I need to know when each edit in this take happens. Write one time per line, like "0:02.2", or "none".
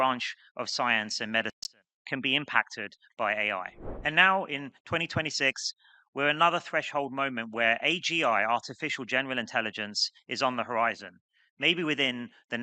0:03.8